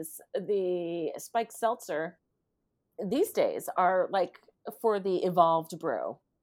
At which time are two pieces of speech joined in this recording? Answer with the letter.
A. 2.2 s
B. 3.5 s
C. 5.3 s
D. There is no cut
D